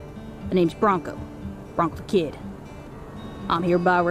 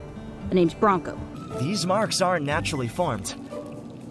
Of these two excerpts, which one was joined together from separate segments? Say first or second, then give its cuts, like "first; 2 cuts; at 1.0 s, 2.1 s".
second; 1 cut; at 1.5 s